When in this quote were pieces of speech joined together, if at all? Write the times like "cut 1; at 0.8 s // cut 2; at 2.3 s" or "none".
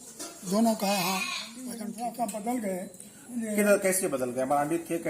cut 1; at 1.7 s